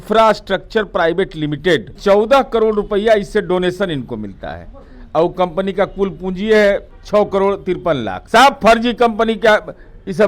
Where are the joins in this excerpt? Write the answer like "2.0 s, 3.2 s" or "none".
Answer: 2.0 s, 6.9 s, 8.1 s